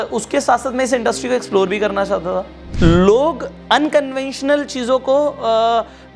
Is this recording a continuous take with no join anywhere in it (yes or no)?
no